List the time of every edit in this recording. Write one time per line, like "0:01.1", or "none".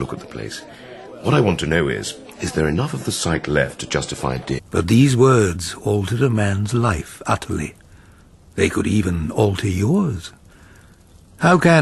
none